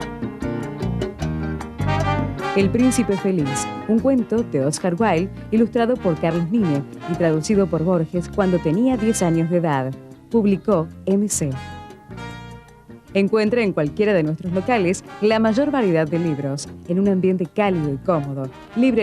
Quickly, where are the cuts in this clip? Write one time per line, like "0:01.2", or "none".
0:02.5